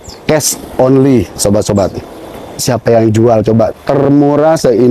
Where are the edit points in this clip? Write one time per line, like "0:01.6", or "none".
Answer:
0:02.6